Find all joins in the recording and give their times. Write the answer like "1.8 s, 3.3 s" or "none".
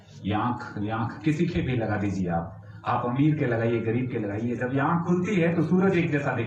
none